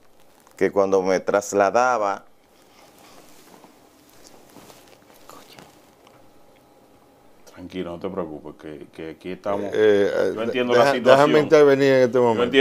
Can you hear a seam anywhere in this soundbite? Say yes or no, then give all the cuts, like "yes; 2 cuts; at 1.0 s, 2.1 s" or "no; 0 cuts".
no; 0 cuts